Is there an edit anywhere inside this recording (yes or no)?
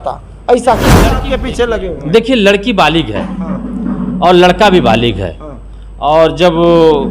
yes